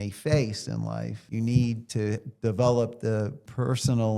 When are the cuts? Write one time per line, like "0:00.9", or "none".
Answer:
0:01.2
0:01.9